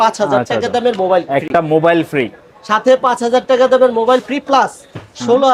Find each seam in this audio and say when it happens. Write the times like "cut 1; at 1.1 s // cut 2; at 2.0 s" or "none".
none